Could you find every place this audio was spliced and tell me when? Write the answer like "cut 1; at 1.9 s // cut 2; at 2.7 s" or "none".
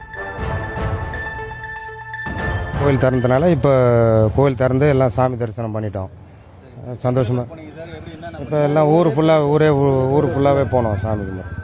cut 1; at 2.8 s